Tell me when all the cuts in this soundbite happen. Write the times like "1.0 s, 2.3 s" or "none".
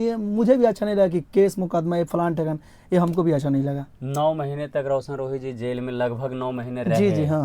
none

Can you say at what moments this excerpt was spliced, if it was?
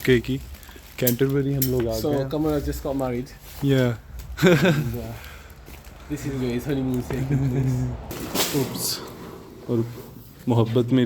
8.2 s

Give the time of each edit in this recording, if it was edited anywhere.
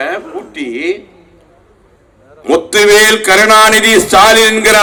none

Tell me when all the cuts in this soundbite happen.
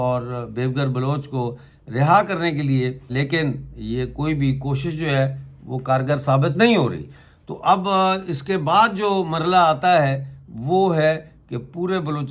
3.1 s

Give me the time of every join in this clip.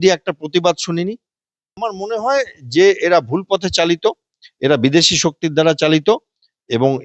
1.8 s

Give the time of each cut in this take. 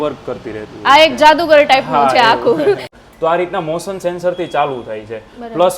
2.9 s

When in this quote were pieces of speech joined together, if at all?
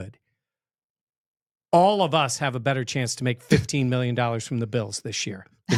none

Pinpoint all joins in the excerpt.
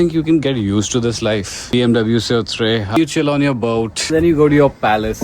1.7 s, 3.0 s, 4.1 s

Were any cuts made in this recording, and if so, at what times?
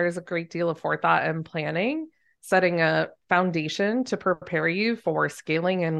none

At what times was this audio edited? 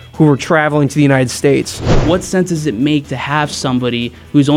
1.9 s

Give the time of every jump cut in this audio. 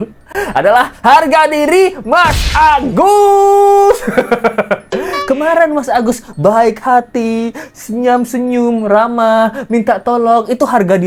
none

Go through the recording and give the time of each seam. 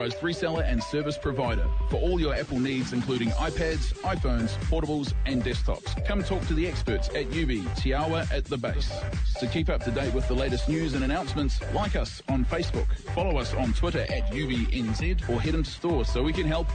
none

